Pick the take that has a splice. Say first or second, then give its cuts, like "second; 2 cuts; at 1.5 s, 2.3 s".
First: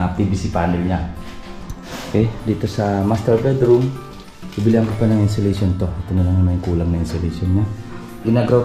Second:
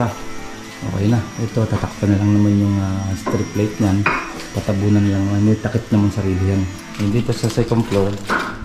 second; 1 cut; at 6.8 s